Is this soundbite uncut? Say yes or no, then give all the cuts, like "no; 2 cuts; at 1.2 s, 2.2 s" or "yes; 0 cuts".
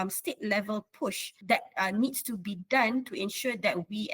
no; 1 cut; at 1.3 s